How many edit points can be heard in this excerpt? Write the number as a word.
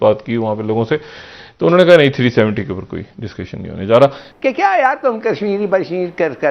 one